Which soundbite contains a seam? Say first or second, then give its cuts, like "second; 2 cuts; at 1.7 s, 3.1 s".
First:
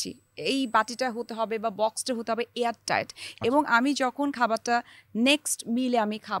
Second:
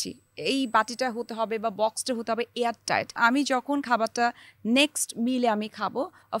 second; 1 cut; at 3.2 s